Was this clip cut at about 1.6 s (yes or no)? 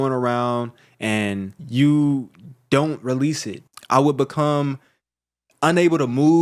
yes